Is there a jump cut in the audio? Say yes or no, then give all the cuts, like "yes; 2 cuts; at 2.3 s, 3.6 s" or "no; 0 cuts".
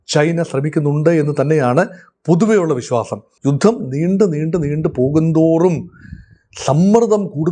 yes; 1 cut; at 3.3 s